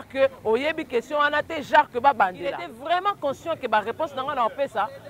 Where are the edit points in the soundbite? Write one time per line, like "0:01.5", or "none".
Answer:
0:02.7

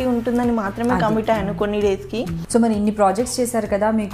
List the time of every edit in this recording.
0:02.4

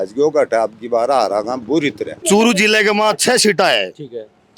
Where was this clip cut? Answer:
0:02.2

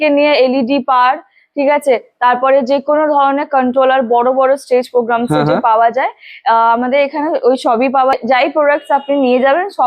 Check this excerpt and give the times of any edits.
0:08.1

